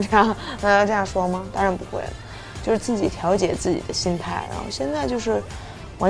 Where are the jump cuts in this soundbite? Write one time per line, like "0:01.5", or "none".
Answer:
none

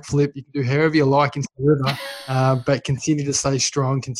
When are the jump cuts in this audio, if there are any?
none

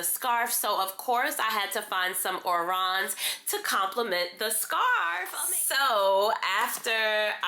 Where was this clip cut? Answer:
0:05.3

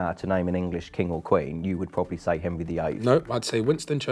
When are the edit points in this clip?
none

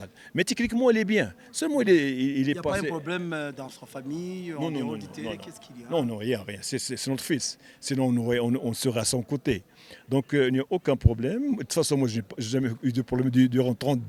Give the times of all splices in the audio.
none

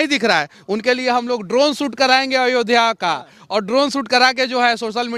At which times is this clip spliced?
none

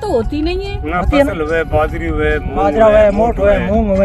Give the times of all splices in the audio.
none

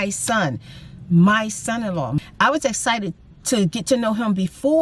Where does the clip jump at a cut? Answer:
0:02.1

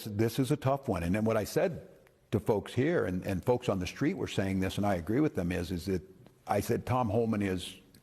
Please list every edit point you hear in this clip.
none

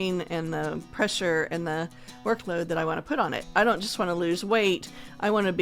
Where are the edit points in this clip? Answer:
0:03.4

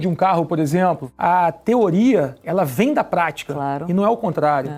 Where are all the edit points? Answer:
0:01.1
0:02.4

